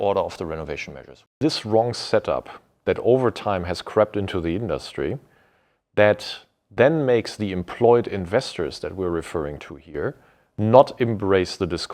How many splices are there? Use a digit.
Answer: 1